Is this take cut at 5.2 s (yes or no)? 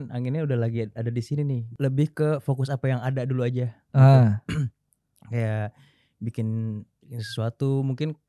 no